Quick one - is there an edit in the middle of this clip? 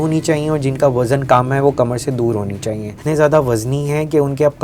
yes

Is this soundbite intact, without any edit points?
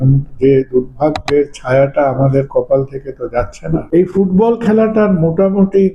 no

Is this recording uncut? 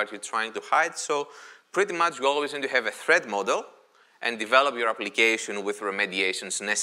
yes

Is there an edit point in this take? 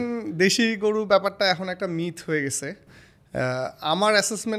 no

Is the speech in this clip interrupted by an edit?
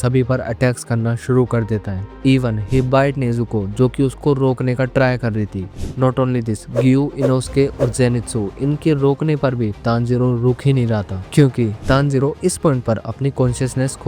no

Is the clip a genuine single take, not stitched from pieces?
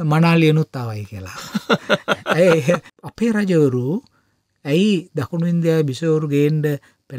no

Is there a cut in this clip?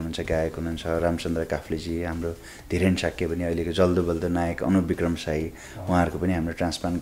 no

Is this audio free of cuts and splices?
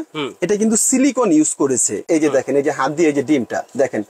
no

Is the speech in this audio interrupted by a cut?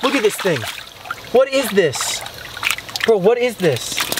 no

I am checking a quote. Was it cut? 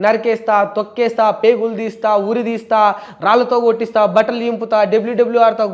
no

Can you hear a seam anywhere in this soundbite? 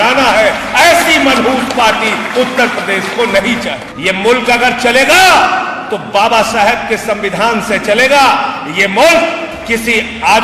yes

